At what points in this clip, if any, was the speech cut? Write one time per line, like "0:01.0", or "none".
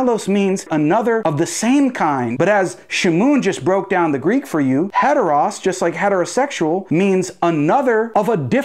0:02.3